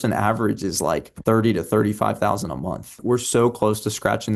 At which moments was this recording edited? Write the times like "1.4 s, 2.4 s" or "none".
1.1 s, 3.0 s